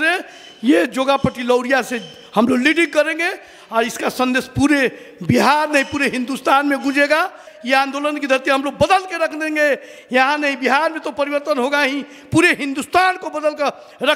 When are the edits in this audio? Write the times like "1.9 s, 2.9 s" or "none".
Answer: 7.5 s